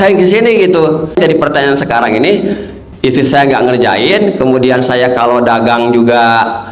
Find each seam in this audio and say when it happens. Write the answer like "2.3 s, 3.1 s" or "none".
1.2 s